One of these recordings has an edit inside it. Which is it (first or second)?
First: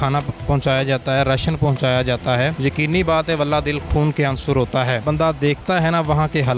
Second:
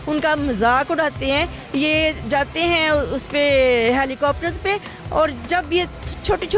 first